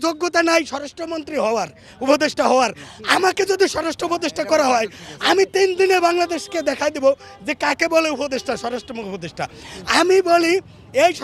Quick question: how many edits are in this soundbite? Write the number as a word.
zero